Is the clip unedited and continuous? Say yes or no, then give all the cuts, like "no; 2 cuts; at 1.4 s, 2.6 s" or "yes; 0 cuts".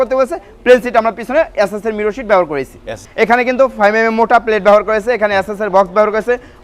no; 1 cut; at 3.0 s